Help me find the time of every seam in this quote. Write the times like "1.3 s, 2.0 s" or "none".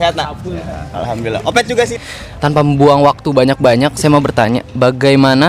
1.9 s